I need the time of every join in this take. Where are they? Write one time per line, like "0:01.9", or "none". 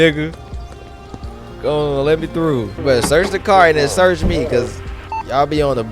0:02.7